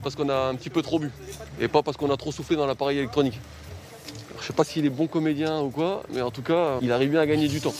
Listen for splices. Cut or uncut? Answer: cut